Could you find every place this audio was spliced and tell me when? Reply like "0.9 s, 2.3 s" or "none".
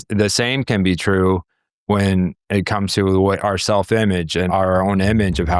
4.5 s